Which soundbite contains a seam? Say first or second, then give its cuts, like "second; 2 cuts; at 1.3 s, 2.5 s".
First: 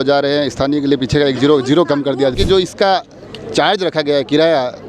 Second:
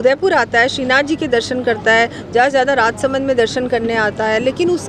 first; 1 cut; at 2.4 s